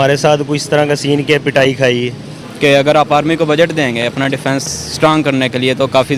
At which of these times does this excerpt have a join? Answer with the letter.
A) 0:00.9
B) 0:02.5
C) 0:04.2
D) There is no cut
D